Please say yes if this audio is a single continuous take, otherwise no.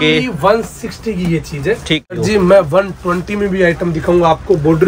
no